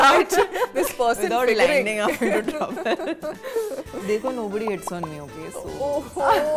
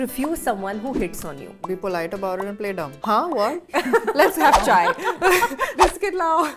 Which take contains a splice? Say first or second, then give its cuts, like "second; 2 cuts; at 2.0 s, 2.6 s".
second; 4 cuts; at 1.6 s, 3.0 s, 3.6 s, 5.7 s